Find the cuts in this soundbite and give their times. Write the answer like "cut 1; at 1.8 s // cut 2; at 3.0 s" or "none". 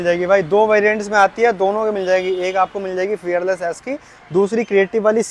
none